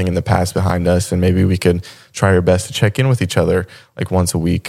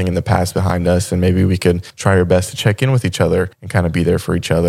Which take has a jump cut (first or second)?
second